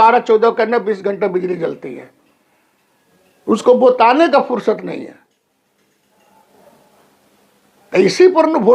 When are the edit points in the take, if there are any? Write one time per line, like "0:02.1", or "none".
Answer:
none